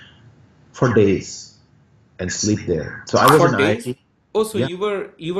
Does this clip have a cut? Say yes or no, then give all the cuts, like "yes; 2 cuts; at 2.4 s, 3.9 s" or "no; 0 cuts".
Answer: no; 0 cuts